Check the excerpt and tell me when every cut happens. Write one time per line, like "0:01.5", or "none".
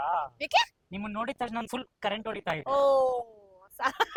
none